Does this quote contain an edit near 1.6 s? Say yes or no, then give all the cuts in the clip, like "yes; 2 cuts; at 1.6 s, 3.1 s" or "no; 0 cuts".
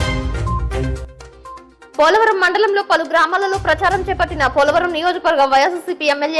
yes; 1 cut; at 1.6 s